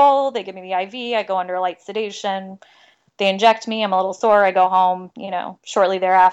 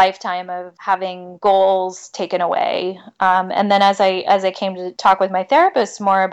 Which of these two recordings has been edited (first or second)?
second